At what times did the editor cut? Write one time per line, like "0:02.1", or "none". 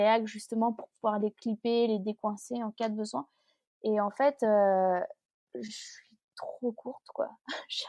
none